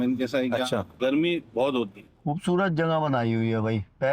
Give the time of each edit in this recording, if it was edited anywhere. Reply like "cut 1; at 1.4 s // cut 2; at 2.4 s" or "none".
cut 1; at 0.9 s // cut 2; at 2.1 s